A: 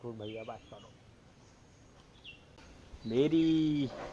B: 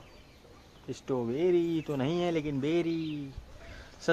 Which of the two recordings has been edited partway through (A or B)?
A